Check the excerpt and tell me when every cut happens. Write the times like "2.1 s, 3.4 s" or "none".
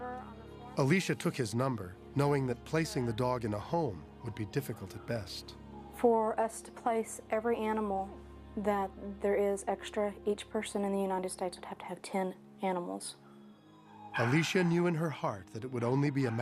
11.3 s

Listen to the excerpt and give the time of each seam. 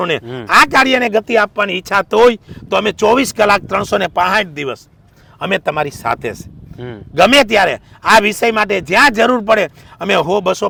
none

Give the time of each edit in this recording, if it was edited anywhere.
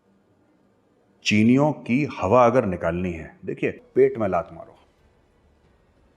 3.8 s

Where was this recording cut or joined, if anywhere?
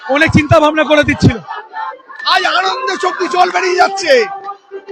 1.7 s

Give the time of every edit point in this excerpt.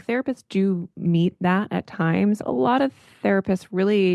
2.4 s

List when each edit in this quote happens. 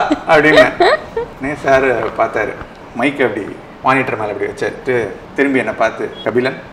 2.8 s

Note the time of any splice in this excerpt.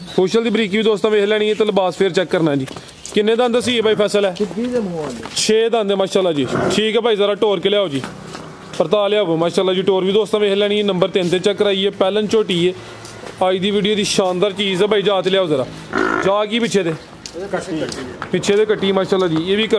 none

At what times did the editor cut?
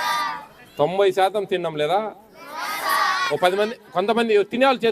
none

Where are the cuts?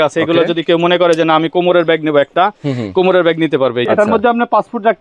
3.9 s

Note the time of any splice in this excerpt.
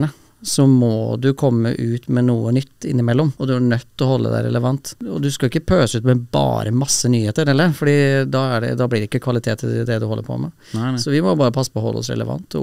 3.4 s, 5.0 s

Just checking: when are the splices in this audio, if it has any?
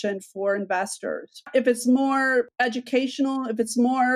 1.4 s, 2.5 s

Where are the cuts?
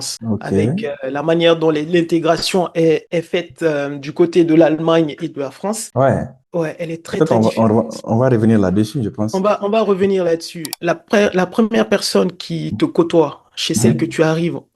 10.7 s

